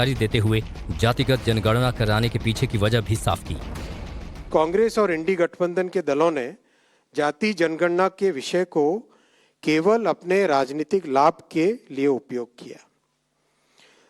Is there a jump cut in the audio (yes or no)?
yes